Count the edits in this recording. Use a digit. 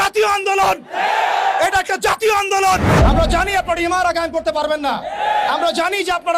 1